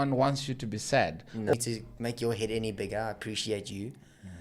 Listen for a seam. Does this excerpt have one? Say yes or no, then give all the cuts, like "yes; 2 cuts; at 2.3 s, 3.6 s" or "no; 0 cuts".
yes; 1 cut; at 1.5 s